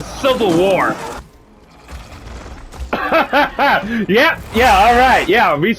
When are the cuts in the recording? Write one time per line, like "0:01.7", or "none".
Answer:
0:01.2